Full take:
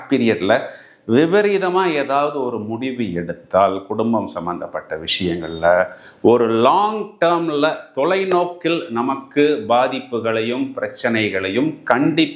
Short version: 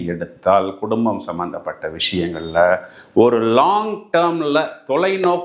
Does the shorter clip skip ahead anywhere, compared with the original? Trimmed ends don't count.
no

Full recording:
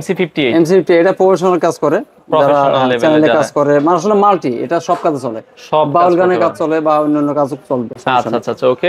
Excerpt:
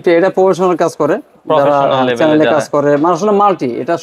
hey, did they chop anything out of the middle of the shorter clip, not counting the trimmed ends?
no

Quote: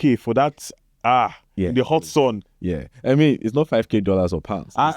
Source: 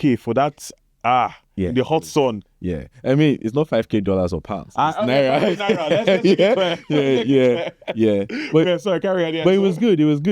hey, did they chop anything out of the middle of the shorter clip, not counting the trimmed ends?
no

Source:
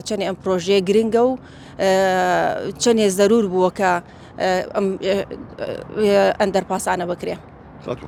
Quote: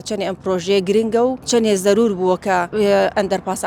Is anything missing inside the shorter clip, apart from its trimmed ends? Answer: yes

